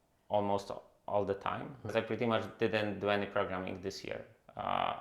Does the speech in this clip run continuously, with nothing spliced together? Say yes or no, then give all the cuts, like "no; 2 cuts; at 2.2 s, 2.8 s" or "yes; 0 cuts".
no; 1 cut; at 1.9 s